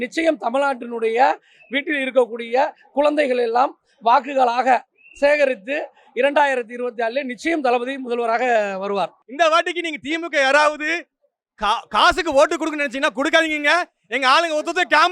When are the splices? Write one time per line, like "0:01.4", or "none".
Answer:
0:09.2

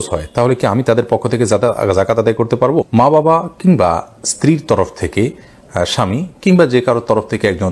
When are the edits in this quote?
none

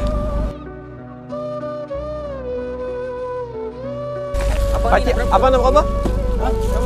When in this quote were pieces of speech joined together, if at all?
none

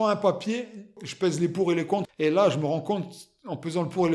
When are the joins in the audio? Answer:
0:02.1

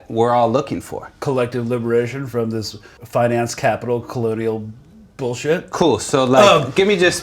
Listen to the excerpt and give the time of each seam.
0:01.1
0:02.9

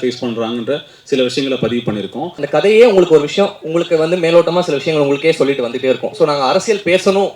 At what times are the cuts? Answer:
0:02.4

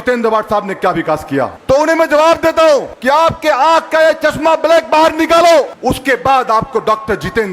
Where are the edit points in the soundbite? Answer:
0:01.6
0:02.9
0:05.7

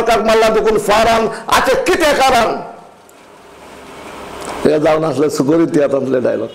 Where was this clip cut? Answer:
none

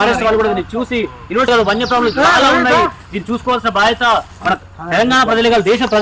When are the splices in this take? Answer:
0:01.5

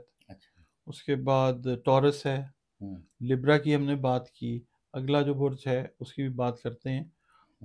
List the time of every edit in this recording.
none

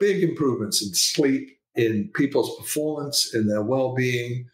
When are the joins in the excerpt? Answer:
0:01.6

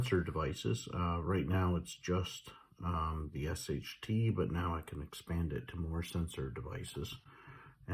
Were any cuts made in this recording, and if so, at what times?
none

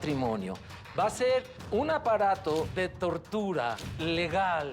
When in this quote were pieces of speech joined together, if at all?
0:01.6
0:02.7
0:03.9

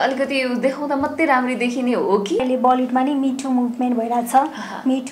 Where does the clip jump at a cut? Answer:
0:02.4

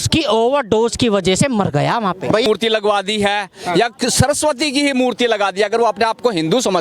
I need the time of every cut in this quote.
0:02.5

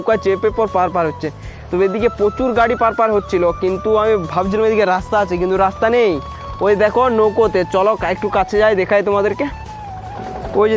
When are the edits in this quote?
none

